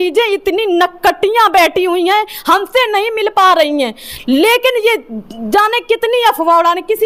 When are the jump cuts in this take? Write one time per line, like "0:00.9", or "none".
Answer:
none